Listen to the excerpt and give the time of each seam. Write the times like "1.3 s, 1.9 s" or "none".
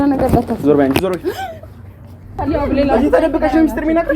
2.3 s